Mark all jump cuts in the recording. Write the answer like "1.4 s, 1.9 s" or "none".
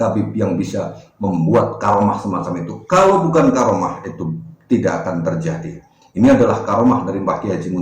none